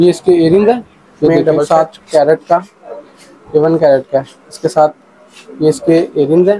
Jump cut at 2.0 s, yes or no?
yes